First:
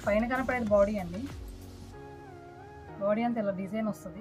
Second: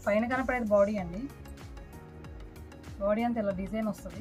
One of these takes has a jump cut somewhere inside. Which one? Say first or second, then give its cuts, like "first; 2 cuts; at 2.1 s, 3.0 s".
first; 2 cuts; at 1.3 s, 3.0 s